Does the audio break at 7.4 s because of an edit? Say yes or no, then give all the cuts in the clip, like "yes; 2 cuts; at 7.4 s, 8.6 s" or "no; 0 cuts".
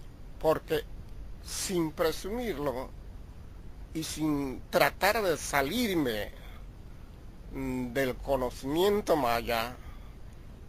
yes; 1 cut; at 7.4 s